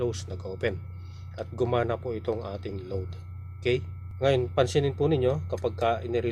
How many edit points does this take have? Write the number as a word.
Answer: zero